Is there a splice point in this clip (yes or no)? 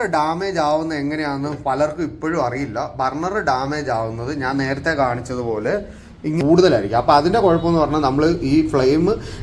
yes